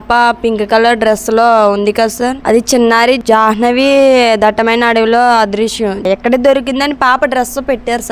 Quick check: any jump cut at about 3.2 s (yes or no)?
yes